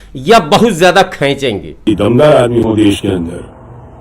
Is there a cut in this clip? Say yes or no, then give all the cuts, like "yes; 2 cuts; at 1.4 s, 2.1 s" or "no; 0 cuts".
yes; 1 cut; at 1.7 s